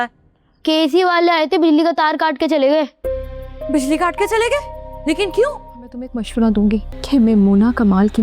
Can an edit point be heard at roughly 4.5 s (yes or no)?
no